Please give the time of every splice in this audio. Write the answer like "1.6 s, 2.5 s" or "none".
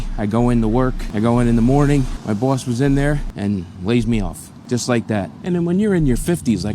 1.0 s, 2.1 s, 4.5 s, 5.3 s